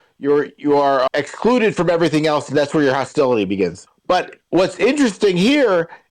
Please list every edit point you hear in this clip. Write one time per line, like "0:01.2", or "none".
0:01.1
0:03.9